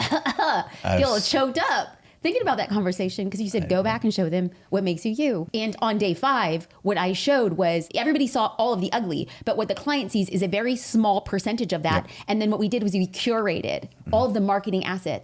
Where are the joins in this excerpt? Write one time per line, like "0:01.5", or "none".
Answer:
none

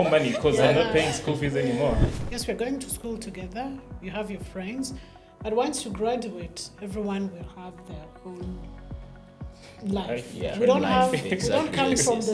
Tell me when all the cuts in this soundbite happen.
0:02.2

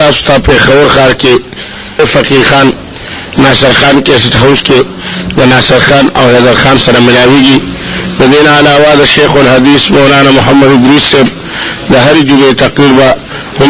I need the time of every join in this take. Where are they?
0:02.0

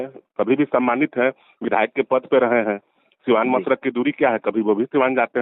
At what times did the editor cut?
none

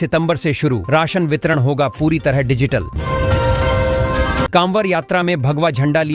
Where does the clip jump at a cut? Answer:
0:02.9
0:04.5

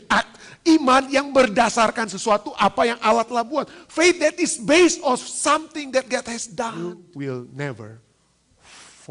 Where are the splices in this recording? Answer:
0:07.0

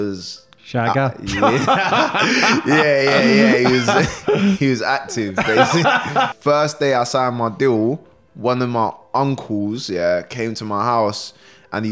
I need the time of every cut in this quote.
0:06.3

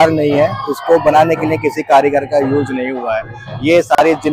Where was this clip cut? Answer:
none

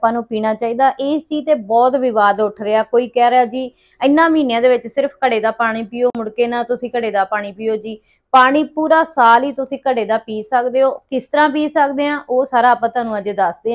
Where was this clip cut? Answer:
none

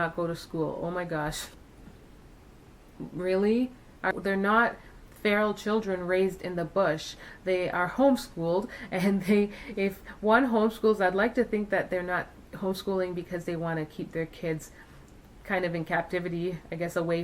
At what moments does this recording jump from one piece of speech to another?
0:01.4

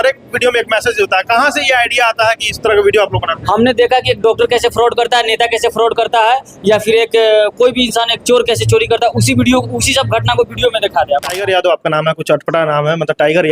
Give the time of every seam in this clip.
0:11.4

